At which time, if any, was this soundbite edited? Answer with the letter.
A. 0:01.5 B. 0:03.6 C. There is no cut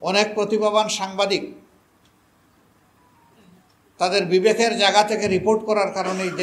C